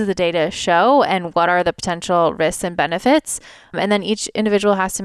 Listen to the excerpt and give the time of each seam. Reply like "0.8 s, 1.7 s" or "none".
3.7 s